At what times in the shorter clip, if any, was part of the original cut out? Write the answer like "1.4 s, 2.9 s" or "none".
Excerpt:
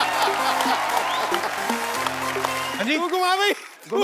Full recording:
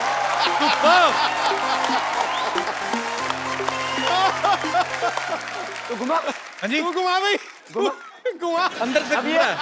2.7 s